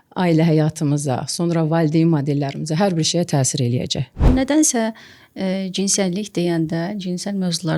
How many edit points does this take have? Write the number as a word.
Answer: one